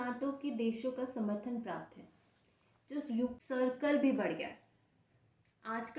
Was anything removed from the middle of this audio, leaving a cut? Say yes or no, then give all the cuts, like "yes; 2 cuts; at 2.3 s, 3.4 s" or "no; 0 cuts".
yes; 1 cut; at 3.3 s